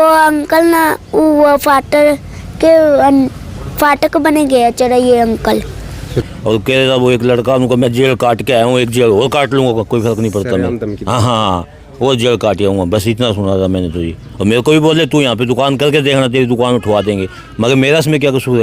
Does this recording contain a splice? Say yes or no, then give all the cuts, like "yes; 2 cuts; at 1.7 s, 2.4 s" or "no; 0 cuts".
yes; 1 cut; at 6.2 s